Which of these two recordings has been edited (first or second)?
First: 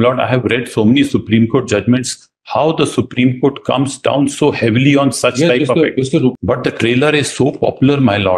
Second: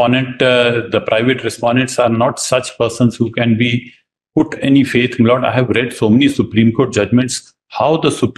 first